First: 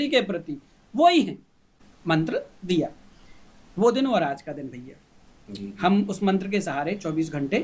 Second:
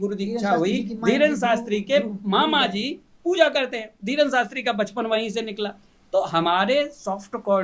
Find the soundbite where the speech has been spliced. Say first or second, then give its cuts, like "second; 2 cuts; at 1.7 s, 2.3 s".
first; 1 cut; at 1.8 s